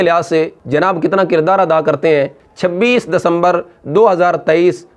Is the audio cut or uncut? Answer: cut